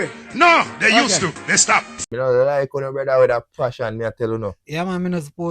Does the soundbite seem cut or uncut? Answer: cut